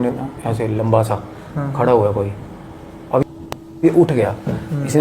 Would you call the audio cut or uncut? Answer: cut